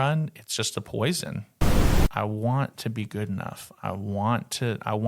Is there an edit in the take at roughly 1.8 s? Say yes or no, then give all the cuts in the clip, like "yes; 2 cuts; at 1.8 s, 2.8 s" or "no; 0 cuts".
yes; 1 cut; at 1.8 s